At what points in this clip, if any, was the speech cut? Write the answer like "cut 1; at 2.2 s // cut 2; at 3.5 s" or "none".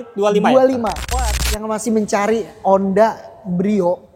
cut 1; at 1.1 s